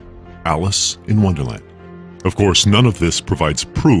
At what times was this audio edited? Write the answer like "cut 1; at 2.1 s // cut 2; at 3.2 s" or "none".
cut 1; at 0.9 s